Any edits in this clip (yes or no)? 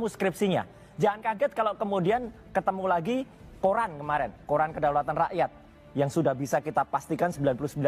no